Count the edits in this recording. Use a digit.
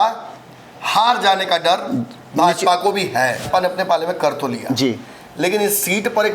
1